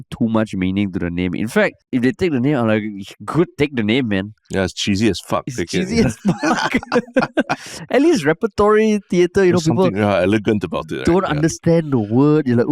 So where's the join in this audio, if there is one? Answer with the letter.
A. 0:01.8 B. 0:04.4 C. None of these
A